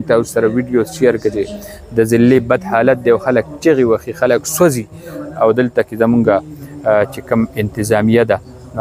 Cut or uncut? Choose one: uncut